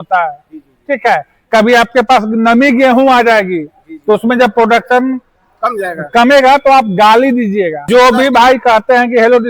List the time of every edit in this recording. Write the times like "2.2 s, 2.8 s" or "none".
7.8 s